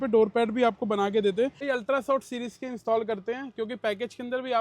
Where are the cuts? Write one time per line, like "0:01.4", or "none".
0:01.6